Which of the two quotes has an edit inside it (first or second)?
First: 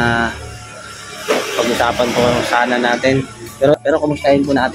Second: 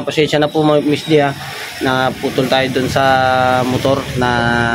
first